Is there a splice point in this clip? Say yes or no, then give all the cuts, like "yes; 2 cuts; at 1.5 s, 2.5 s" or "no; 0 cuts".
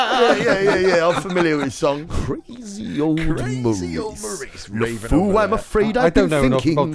yes; 1 cut; at 2.1 s